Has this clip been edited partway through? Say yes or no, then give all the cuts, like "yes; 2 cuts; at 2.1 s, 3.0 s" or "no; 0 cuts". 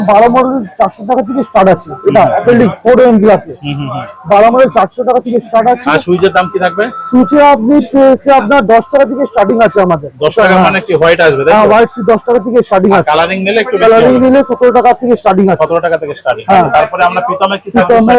no; 0 cuts